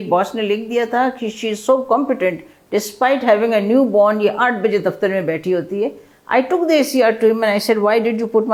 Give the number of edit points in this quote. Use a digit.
0